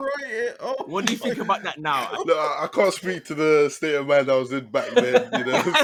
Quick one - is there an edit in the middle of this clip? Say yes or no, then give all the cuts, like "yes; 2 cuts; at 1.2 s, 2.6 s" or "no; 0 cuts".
no; 0 cuts